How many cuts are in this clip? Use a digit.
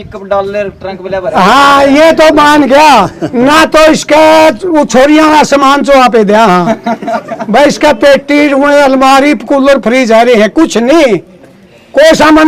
0